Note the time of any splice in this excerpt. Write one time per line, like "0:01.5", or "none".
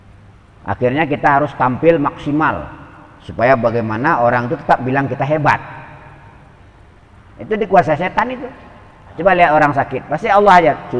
0:09.2